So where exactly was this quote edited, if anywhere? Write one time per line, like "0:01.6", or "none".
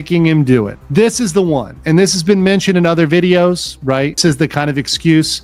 none